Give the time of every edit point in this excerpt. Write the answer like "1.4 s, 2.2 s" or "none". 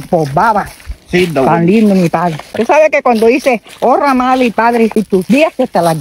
2.5 s, 5.1 s